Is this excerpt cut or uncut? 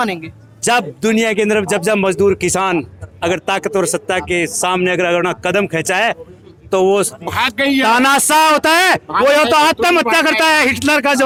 uncut